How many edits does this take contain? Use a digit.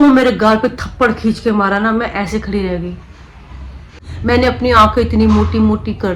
1